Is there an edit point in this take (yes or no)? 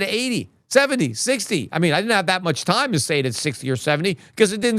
no